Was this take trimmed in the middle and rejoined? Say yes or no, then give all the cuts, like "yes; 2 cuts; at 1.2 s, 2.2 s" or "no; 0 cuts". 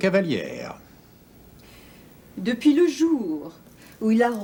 no; 0 cuts